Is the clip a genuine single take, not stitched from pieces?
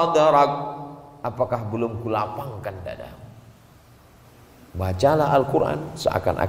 no; 1 cut; at 4.2 s

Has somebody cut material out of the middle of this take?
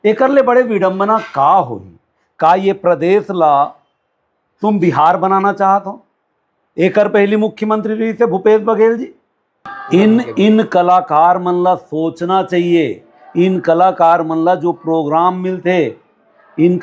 yes; 1 cut; at 9.7 s

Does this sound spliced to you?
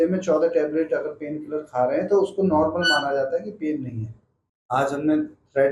yes; 1 cut; at 4.6 s

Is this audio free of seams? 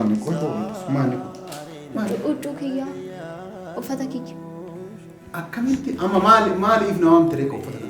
yes; 0 cuts

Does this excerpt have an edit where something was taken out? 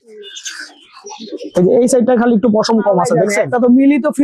yes; 1 cut; at 3.3 s

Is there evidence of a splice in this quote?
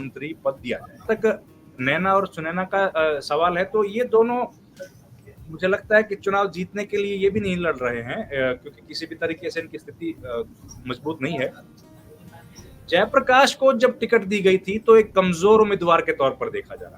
yes; 1 cut; at 1.0 s

